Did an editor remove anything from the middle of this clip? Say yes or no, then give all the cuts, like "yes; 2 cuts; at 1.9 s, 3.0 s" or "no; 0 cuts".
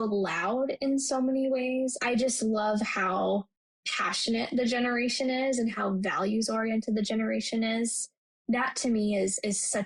yes; 1 cut; at 2.0 s